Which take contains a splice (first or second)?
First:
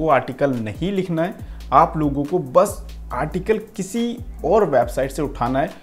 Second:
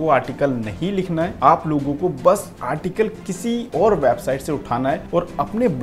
second